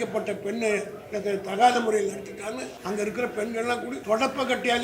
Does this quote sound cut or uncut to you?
cut